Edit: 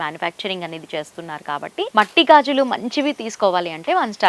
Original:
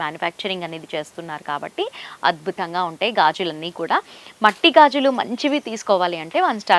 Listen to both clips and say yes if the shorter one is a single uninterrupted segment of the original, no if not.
no